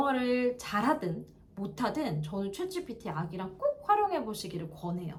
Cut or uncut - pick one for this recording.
uncut